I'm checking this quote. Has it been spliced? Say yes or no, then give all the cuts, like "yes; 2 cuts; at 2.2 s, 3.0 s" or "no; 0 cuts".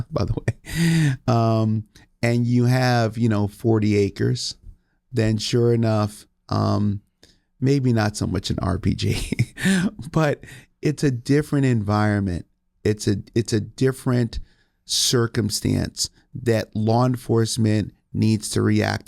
no; 0 cuts